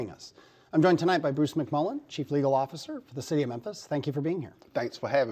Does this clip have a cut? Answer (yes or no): no